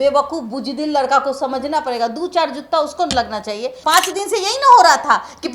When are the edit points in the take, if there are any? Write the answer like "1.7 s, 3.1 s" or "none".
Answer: 3.7 s